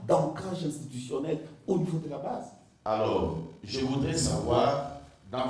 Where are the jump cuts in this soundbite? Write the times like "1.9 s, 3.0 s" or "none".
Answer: 2.6 s